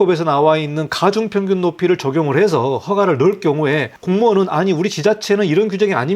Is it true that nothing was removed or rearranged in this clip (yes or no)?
no